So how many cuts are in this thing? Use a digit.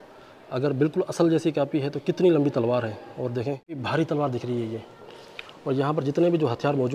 0